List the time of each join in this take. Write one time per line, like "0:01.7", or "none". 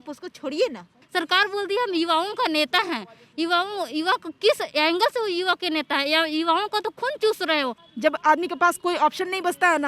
0:01.0
0:07.8

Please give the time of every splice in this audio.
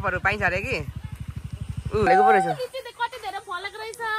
0:02.1

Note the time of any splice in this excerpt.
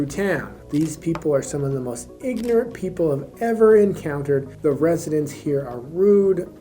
0:04.6

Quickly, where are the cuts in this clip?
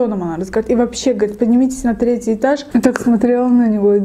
0:02.7

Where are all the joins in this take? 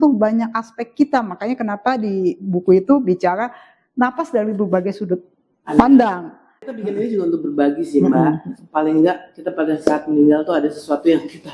0:06.6

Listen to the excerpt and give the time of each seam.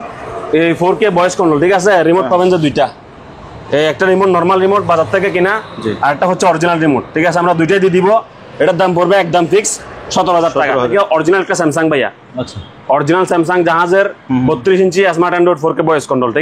0:10.9

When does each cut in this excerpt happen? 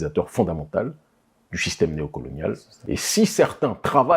0:02.7

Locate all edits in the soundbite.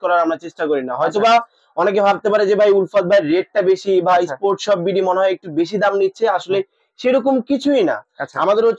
none

